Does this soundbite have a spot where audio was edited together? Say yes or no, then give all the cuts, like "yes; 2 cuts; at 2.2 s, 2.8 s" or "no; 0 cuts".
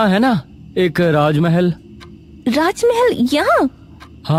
no; 0 cuts